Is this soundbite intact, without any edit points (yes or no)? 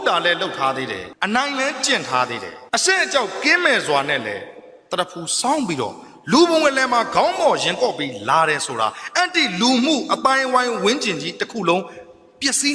no